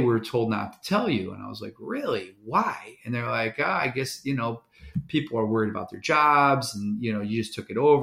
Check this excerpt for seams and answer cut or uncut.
uncut